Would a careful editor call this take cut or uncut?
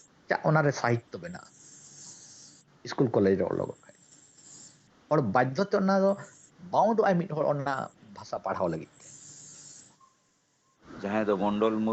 cut